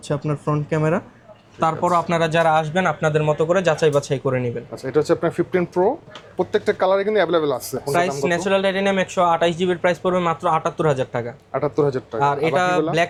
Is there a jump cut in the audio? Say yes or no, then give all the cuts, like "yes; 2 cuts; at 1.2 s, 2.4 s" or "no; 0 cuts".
no; 0 cuts